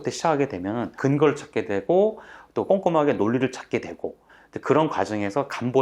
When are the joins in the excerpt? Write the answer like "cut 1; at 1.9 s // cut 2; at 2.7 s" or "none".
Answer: cut 1; at 0.9 s